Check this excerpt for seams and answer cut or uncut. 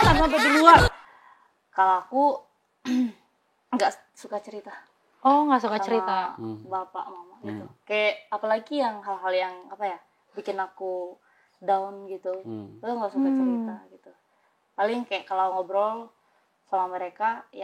cut